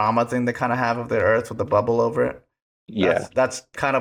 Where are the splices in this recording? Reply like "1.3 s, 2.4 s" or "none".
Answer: none